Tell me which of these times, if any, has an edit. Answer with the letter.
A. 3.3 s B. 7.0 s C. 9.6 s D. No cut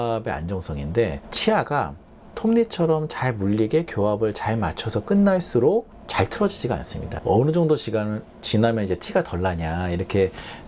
B